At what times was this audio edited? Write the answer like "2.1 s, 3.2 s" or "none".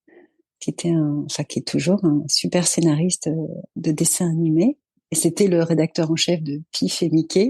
none